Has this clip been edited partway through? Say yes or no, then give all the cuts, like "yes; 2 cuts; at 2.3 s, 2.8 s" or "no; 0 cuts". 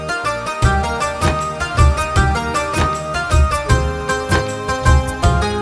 no; 0 cuts